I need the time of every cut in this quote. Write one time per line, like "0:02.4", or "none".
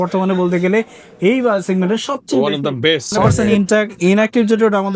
0:03.3